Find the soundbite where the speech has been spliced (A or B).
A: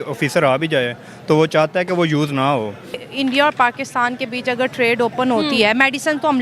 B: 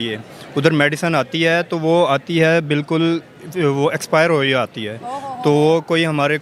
A